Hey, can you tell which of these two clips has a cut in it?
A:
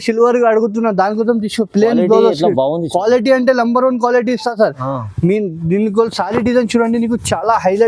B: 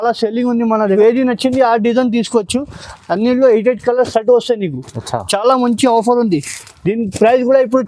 B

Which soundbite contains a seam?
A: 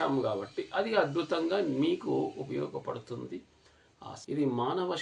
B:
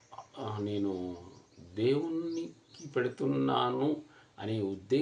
A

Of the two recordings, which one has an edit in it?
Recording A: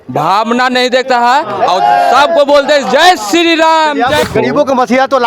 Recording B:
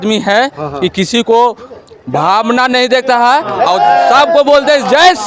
A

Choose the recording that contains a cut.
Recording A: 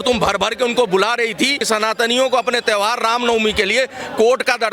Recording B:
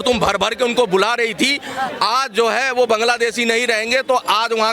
A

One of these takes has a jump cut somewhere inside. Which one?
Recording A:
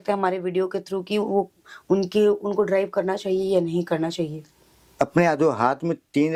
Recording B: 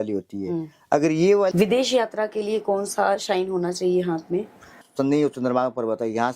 B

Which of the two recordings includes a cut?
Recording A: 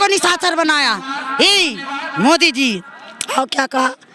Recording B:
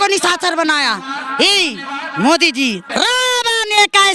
B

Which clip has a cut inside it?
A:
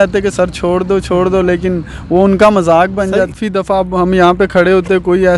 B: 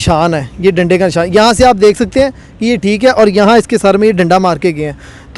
A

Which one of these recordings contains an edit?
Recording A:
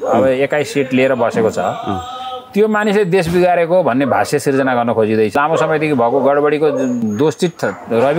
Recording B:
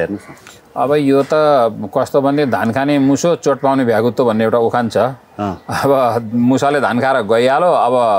A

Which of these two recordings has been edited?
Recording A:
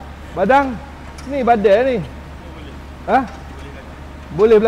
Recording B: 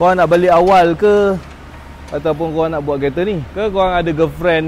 B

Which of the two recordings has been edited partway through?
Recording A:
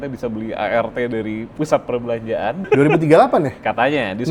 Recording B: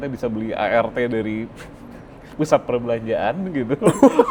A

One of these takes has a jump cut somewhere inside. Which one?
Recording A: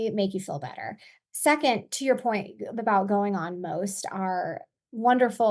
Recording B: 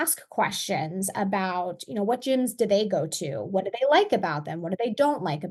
A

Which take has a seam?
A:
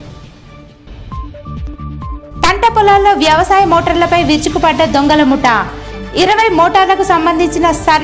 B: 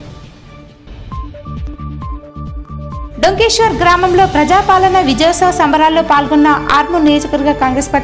A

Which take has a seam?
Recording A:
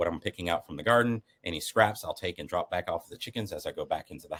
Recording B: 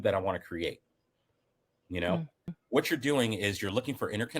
B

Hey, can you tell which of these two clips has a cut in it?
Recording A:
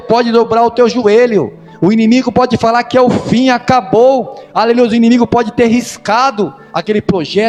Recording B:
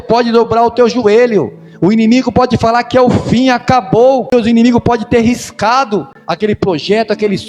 B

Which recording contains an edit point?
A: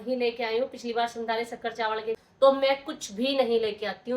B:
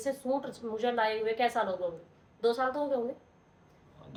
A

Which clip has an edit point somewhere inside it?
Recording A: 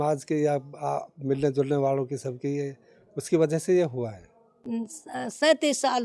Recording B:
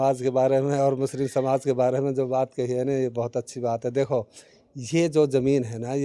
A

